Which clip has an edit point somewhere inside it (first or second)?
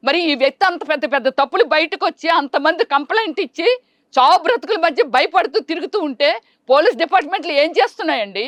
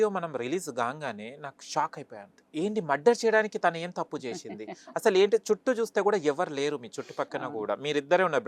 second